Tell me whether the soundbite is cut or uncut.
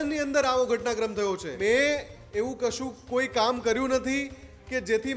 cut